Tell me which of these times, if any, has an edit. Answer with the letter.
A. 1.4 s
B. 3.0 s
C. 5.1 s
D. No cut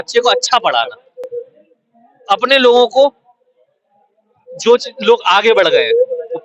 A